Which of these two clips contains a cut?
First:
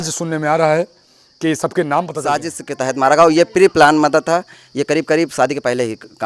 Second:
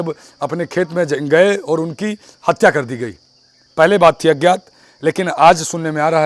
first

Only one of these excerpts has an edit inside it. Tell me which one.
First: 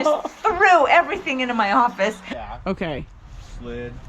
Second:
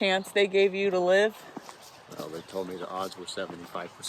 first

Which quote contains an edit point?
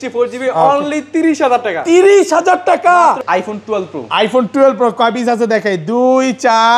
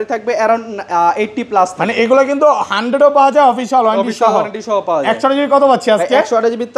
first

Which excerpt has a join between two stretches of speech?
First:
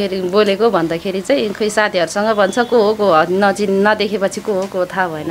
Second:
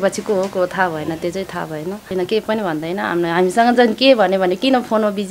second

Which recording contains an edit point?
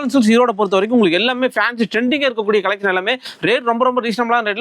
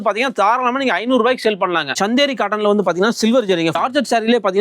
second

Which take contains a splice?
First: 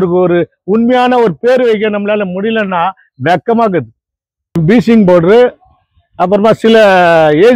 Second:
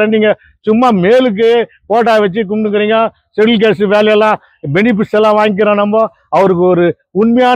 first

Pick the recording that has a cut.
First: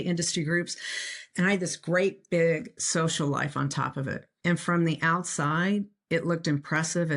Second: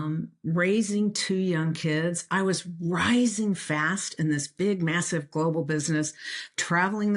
first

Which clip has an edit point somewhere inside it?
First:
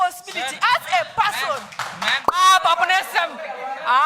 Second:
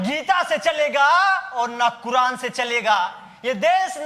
first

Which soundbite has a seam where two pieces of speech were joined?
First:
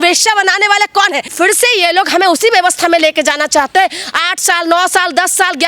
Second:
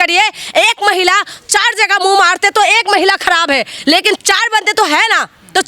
first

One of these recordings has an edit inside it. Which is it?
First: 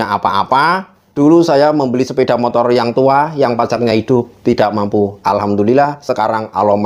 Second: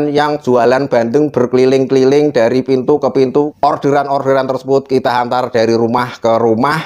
first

